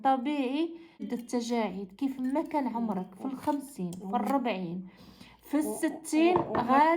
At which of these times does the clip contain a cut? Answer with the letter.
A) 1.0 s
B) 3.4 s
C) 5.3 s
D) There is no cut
A